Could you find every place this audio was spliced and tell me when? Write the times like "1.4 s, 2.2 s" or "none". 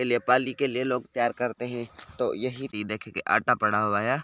2.7 s